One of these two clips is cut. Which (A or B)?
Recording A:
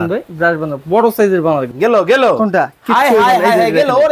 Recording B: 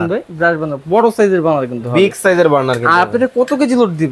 A